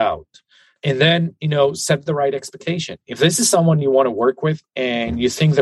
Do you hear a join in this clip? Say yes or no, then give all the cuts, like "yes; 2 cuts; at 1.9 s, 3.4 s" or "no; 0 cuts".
yes; 1 cut; at 4.7 s